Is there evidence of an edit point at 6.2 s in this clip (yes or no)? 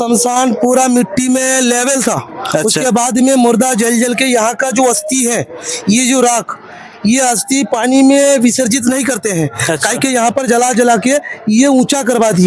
no